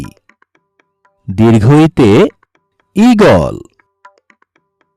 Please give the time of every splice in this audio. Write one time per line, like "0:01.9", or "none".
none